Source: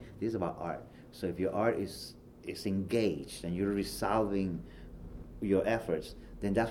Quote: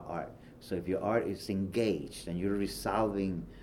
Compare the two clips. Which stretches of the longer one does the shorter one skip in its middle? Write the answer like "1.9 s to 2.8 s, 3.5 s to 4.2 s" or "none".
1.9 s to 2.6 s